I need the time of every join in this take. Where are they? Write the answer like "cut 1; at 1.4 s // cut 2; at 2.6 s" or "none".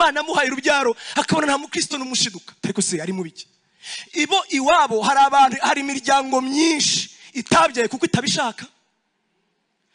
none